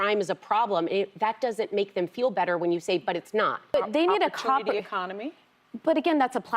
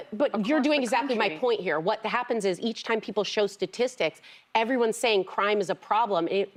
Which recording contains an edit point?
first; 1 cut; at 3.7 s

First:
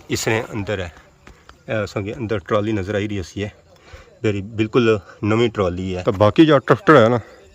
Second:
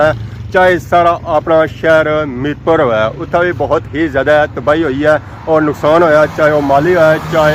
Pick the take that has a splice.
first; 1 cut; at 5.9 s

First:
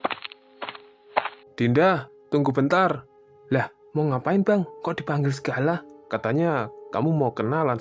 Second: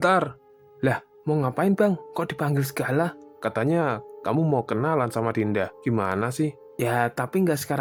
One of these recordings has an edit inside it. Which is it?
first; 1 cut; at 1.4 s

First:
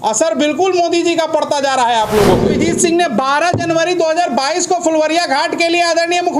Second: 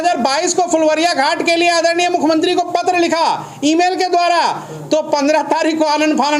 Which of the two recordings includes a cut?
first; 1 cut; at 2.6 s

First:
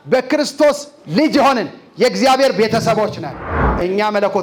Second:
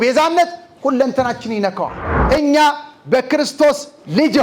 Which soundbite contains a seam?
second; 1 cut; at 2.1 s

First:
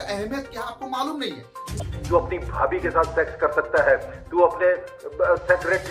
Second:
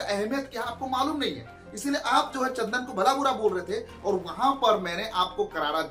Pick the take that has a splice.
first; 1 cut; at 1.8 s

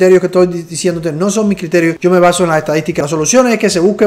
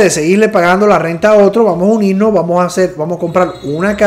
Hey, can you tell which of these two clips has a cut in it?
first; 2 cuts; at 2.0 s, 3.0 s

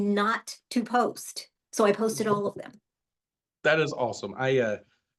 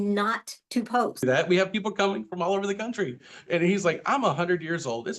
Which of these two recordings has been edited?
second; 1 cut; at 1.2 s

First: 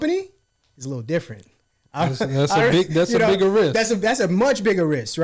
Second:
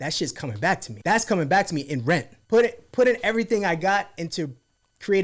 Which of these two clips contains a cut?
second; 2 cuts; at 0.9 s, 2.3 s

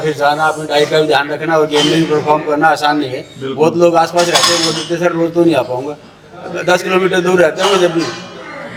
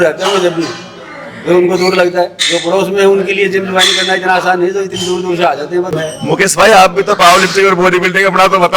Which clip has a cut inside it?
second; 1 cut; at 5.9 s

